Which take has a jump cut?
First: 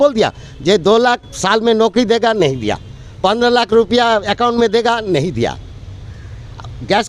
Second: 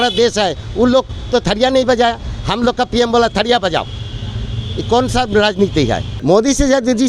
second; 1 cut; at 6.1 s

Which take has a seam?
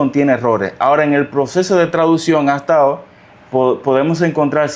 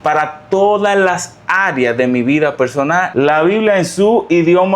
second; 1 cut; at 3.1 s

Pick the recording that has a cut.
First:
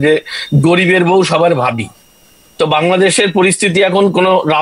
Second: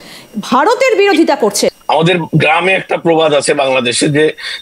second; 1 cut; at 1.8 s

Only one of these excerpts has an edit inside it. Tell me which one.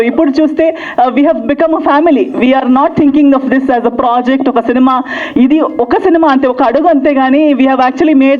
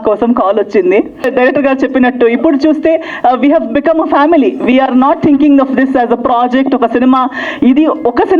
second; 1 cut; at 1.3 s

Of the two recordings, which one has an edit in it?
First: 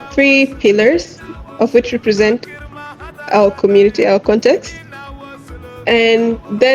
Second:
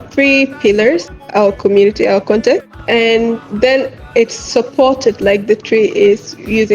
second; 2 cuts; at 1.2 s, 2.7 s

